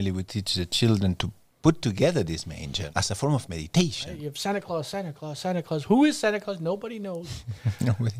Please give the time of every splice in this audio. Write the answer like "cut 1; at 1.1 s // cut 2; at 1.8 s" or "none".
cut 1; at 2.8 s // cut 2; at 4.3 s